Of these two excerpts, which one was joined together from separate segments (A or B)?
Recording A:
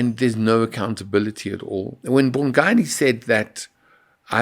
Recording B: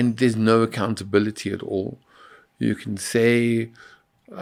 A